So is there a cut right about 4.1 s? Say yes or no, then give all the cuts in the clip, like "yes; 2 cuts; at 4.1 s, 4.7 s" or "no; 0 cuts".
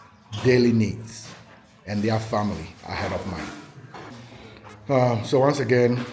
yes; 1 cut; at 4.1 s